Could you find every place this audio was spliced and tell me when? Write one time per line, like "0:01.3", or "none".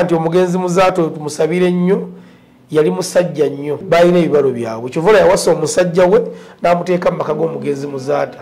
0:03.8